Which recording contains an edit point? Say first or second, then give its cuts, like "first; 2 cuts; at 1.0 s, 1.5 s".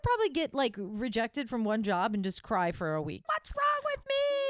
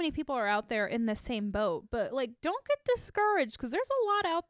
first; 1 cut; at 3.2 s